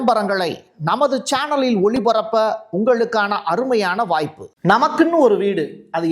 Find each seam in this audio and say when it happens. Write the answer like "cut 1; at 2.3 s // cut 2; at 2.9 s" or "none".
cut 1; at 4.4 s